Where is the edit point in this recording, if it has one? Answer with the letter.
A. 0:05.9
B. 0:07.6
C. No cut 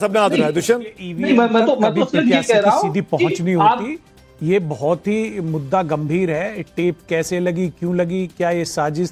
C